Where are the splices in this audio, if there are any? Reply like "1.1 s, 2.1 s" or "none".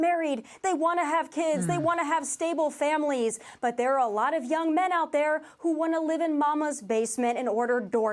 4.3 s